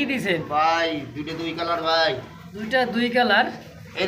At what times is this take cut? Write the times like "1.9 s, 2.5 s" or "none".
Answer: none